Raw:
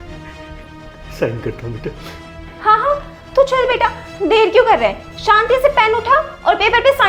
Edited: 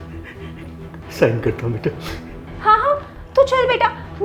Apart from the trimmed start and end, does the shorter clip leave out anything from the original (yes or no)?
no